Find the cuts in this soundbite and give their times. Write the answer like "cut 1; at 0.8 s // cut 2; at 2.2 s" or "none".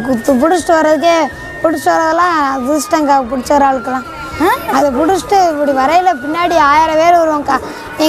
cut 1; at 4.7 s